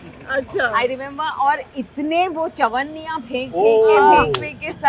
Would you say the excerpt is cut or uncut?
uncut